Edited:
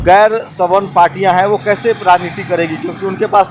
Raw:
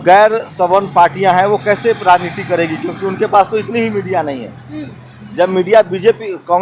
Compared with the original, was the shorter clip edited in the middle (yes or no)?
no